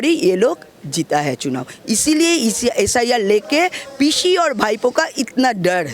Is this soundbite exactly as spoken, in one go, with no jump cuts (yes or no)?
yes